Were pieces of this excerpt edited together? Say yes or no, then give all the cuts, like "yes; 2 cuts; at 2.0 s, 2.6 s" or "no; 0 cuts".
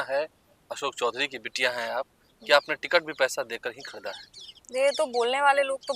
no; 0 cuts